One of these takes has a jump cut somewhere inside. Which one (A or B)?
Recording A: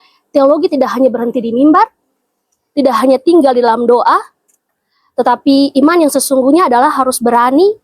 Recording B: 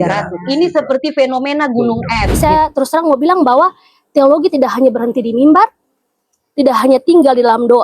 B